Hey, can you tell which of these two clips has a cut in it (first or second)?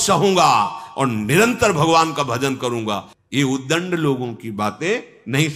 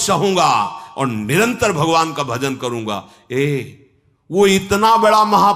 first